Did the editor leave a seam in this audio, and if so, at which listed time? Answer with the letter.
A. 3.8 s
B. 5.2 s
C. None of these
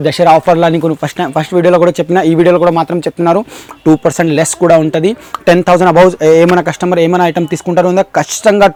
C